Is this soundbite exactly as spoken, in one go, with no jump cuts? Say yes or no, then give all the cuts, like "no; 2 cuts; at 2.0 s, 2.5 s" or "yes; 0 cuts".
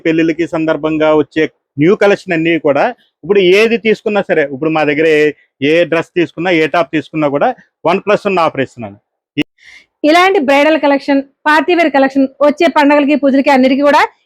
no; 1 cut; at 9.4 s